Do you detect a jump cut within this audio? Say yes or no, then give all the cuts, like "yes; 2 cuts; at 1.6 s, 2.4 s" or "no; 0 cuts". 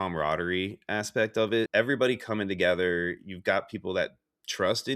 yes; 1 cut; at 1.7 s